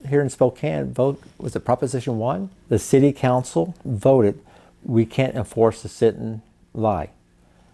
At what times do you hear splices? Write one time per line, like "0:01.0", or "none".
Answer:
0:02.5
0:03.9